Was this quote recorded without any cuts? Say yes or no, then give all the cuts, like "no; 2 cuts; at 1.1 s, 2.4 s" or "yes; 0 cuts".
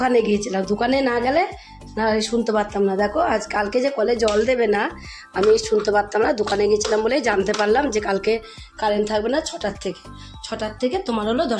yes; 0 cuts